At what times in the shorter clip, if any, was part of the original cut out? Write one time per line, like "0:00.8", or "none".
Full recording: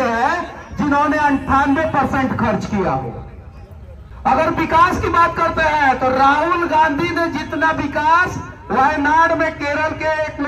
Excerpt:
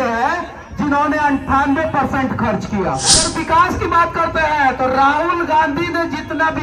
0:03.2